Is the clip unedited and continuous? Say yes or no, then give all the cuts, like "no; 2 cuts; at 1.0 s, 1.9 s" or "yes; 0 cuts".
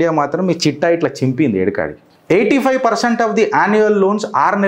no; 1 cut; at 2.1 s